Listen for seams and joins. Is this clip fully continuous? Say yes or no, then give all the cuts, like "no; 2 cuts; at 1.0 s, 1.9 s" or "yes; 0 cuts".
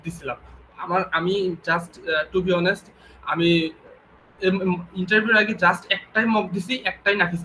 yes; 0 cuts